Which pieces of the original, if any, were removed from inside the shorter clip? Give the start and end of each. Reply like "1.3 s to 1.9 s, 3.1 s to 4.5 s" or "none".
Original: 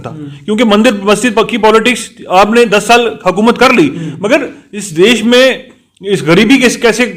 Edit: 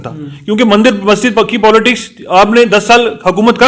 none